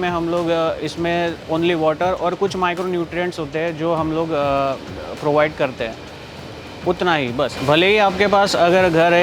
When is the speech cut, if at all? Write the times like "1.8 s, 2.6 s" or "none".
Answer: none